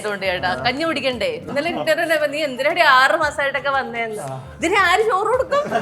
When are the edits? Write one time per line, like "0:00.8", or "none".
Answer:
0:01.5